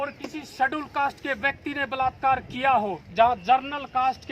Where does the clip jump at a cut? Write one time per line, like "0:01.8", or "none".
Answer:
0:03.0